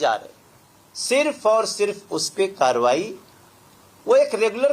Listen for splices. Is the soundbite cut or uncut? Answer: uncut